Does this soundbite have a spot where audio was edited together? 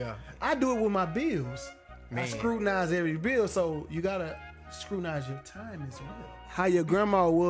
yes; 1 cut; at 6.5 s

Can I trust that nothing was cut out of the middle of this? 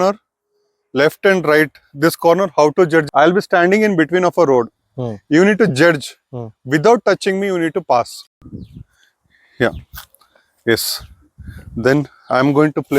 no; 2 cuts; at 3.1 s, 8.2 s

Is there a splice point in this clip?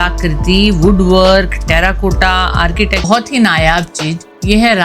yes; 1 cut; at 3.1 s

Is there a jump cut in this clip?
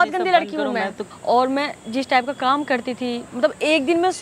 yes; 1 cut; at 1.1 s

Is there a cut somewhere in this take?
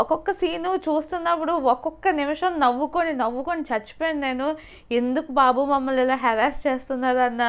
no; 0 cuts

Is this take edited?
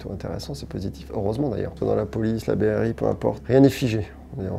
yes; 2 cuts; at 1.7 s, 3.4 s

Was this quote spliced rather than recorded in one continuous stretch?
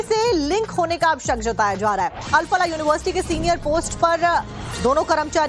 yes; 1 cut; at 3.9 s

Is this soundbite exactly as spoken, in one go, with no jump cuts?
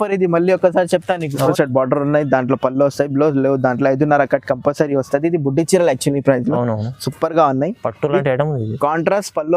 no; 1 cut; at 1.5 s

